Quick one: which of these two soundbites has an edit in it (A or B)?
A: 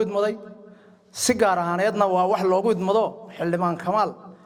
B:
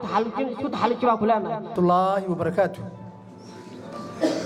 B